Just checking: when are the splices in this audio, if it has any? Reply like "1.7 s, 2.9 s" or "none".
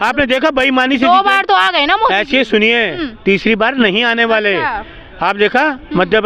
none